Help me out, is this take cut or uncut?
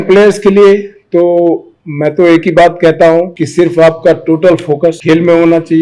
cut